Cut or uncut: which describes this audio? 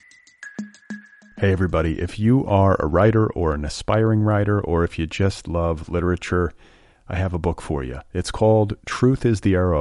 cut